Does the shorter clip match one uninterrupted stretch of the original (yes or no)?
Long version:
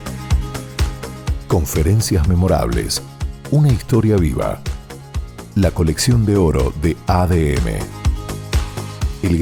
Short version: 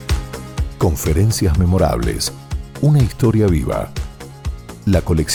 yes